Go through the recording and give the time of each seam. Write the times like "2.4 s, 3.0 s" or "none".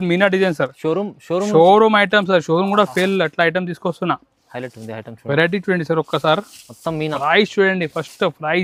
none